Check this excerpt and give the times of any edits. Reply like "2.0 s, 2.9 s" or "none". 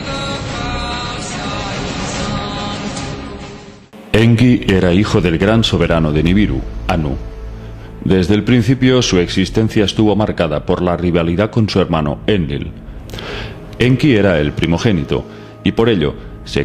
none